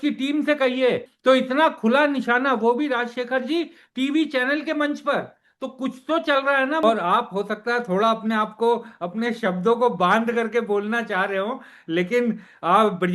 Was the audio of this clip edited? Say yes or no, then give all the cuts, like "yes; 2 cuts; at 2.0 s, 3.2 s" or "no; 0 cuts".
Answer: yes; 2 cuts; at 1.1 s, 6.8 s